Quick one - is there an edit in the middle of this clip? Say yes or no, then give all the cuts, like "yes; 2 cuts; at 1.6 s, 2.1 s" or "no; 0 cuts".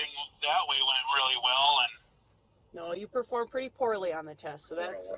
no; 0 cuts